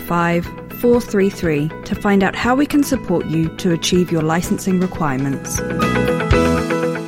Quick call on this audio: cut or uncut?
cut